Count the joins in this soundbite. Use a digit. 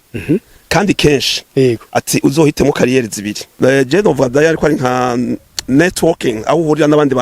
1